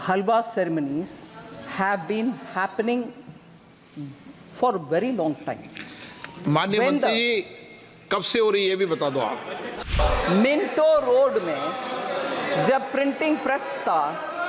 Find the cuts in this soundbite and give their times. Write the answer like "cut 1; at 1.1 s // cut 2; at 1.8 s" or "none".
cut 1; at 9.8 s